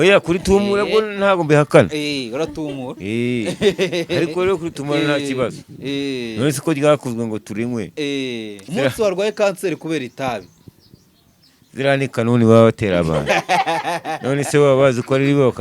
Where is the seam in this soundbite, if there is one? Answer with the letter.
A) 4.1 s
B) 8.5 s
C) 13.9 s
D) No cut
B